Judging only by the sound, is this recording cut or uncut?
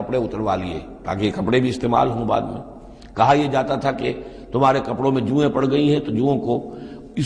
uncut